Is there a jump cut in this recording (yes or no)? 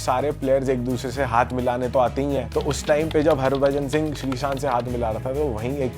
no